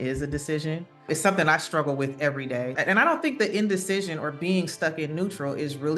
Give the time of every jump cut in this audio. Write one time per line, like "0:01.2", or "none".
0:01.0
0:02.8